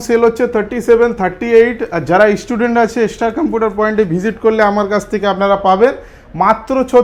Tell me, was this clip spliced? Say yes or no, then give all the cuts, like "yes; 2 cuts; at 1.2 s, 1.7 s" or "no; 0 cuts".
no; 0 cuts